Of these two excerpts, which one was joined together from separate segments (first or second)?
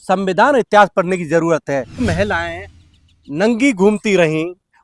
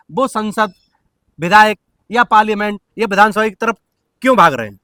first